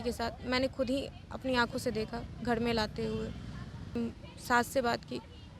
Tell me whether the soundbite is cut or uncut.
cut